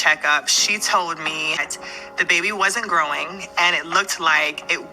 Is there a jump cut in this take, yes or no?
yes